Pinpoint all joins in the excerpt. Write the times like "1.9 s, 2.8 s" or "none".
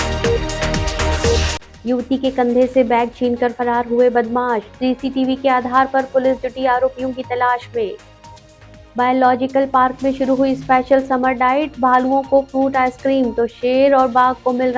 1.6 s

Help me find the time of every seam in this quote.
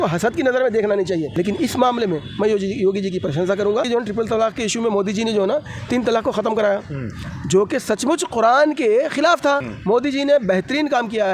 1.3 s, 3.9 s, 9.7 s

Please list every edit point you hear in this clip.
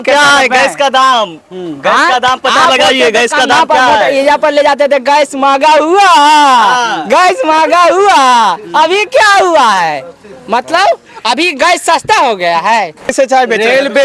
13.1 s

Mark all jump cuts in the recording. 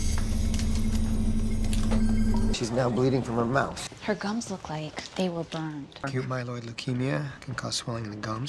1.9 s, 5.9 s

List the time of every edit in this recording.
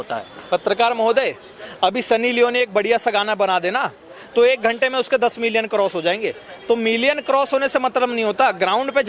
none

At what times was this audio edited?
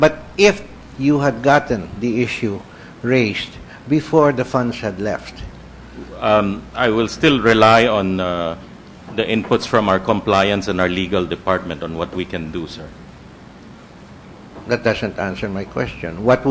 none

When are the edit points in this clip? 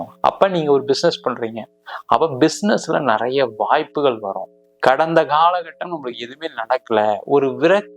4.5 s

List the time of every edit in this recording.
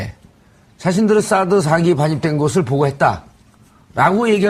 1.7 s

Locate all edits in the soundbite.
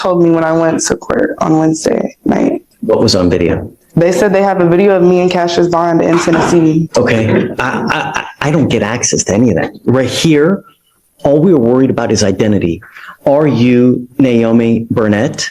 2.7 s, 6.9 s

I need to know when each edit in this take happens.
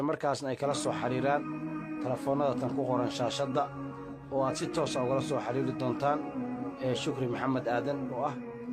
none

